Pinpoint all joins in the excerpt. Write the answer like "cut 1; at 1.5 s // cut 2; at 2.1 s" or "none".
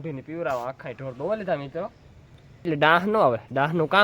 cut 1; at 2.6 s

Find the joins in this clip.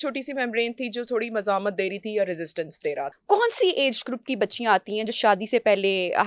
cut 1; at 3.1 s

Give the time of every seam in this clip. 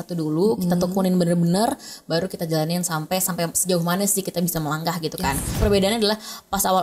cut 1; at 5.6 s

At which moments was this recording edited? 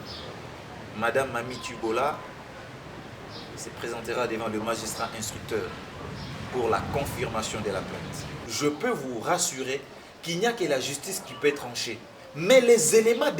cut 1; at 8.4 s

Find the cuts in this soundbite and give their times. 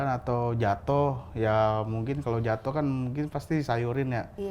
none

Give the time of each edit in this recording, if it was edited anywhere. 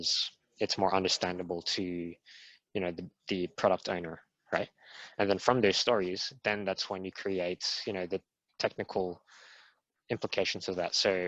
none

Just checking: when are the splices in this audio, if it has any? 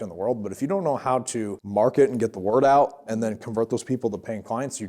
cut 1; at 1.6 s

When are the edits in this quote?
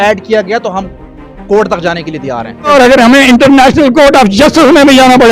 cut 1; at 2.7 s

